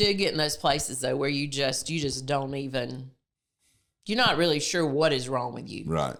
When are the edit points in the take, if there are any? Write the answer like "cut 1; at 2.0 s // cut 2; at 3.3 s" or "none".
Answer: none